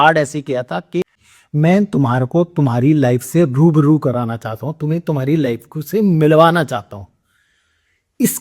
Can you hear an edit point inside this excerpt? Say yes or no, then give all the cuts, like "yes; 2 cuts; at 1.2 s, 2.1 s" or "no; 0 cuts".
yes; 1 cut; at 1.0 s